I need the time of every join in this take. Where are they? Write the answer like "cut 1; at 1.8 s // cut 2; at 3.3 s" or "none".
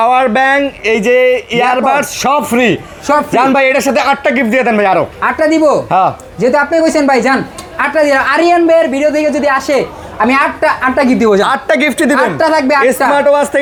none